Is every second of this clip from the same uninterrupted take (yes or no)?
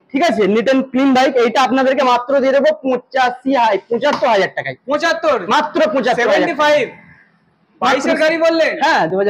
yes